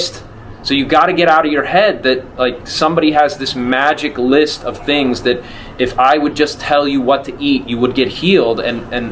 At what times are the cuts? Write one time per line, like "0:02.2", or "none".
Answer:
none